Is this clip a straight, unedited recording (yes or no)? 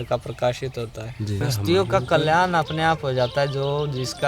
no